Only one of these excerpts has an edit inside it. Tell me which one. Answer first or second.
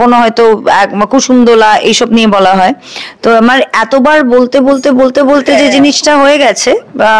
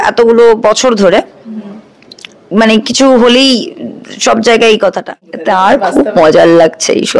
second